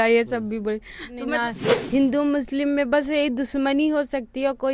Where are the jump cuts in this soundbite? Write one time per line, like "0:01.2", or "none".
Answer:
0:01.2